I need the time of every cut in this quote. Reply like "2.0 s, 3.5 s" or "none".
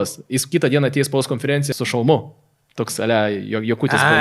1.7 s